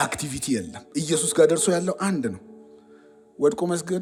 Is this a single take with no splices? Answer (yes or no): yes